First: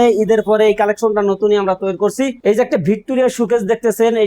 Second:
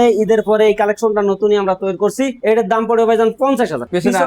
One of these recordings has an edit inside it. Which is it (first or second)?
first